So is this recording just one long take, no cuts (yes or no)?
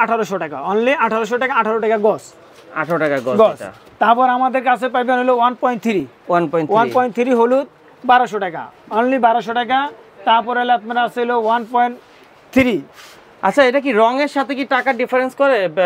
yes